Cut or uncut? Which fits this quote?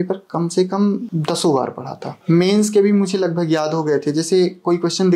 cut